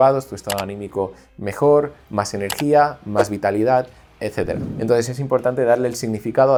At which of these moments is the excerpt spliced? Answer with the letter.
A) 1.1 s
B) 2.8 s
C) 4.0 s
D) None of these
D